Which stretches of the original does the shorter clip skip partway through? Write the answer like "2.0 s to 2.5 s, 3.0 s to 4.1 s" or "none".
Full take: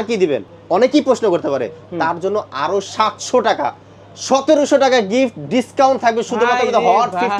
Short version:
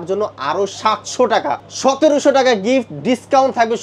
3.8 s to 4.1 s